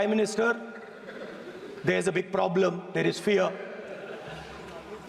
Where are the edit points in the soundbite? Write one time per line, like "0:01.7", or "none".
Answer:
none